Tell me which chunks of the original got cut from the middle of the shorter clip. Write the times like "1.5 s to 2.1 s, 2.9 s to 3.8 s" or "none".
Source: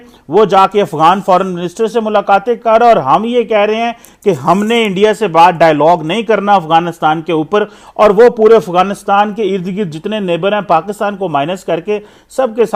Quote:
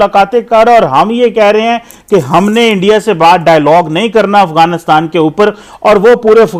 none